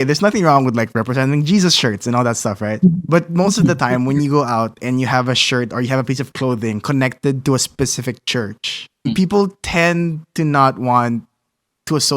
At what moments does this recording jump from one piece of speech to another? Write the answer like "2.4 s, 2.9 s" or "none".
9.1 s